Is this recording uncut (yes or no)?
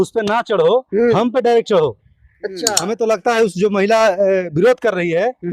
no